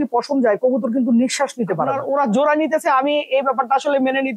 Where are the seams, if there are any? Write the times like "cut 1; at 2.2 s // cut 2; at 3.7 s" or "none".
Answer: cut 1; at 2.0 s